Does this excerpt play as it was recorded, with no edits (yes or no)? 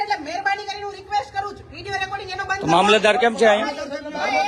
yes